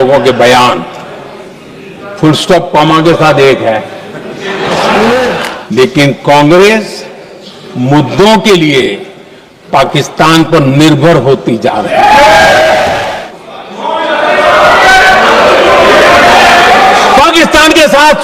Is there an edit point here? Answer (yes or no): yes